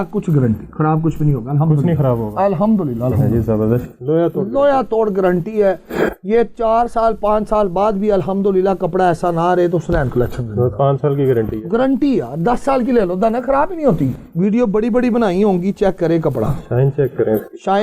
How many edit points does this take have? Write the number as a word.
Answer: two